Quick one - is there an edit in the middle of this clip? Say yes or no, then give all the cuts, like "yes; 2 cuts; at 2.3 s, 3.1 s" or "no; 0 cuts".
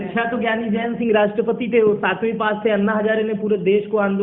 no; 0 cuts